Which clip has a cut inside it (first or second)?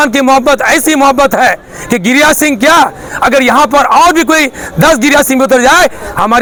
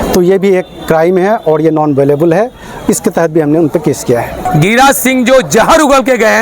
second